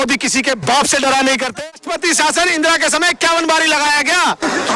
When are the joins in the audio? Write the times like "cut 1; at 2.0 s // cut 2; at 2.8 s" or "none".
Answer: cut 1; at 1.6 s